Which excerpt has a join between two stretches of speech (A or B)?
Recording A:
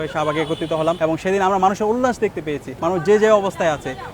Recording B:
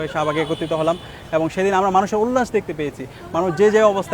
A